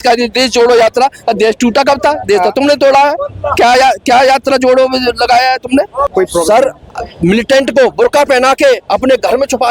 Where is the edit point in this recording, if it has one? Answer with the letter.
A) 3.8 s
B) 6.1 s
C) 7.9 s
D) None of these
B